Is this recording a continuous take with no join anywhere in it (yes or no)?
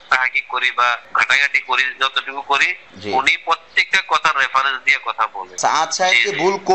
no